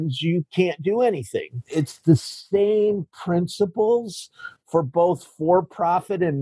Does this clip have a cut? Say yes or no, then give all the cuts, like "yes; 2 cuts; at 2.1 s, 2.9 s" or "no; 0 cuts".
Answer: yes; 1 cut; at 1.6 s